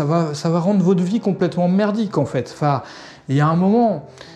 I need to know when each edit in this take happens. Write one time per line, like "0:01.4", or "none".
none